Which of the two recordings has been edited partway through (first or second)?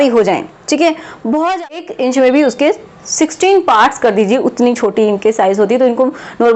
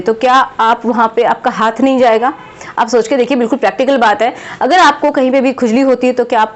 first